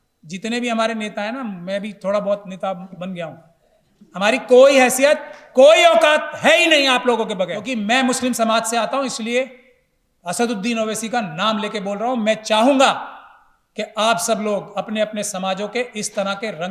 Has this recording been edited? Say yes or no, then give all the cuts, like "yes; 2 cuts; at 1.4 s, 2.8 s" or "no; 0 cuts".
yes; 1 cut; at 7.6 s